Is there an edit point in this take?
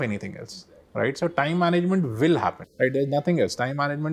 no; 0 cuts

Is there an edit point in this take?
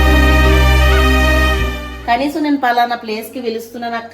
yes; 1 cut; at 1.9 s

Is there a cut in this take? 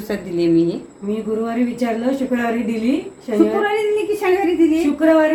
no; 0 cuts

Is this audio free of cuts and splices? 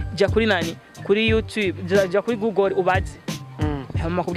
yes; 0 cuts

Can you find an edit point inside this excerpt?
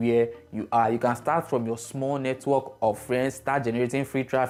no; 0 cuts

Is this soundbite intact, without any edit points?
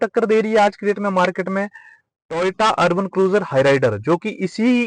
yes; 0 cuts

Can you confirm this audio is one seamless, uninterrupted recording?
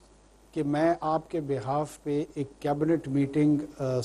yes; 0 cuts

